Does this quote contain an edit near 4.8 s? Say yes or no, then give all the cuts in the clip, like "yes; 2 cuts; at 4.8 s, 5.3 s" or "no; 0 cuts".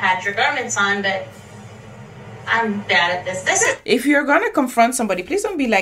no; 0 cuts